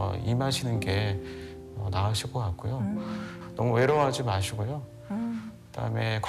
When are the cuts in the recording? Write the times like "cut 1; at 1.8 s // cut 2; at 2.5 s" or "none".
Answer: cut 1; at 3.4 s

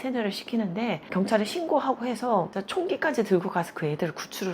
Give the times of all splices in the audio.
cut 1; at 1.0 s // cut 2; at 2.6 s

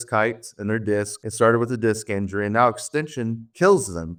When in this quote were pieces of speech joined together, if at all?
none

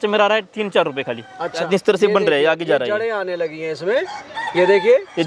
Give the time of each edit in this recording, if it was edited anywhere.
cut 1; at 1.7 s

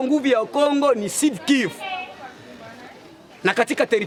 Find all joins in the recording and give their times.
none

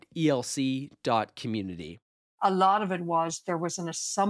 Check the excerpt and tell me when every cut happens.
cut 1; at 2.3 s

